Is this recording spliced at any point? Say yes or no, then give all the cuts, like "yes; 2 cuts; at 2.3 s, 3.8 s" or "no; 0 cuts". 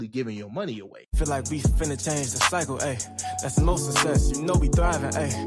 yes; 1 cut; at 1.0 s